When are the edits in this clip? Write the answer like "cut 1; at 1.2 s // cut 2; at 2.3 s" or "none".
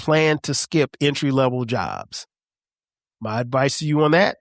none